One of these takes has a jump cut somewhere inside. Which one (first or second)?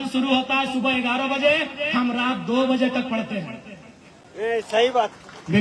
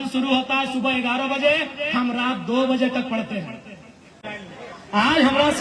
second